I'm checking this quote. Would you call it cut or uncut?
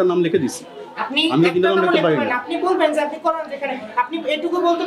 uncut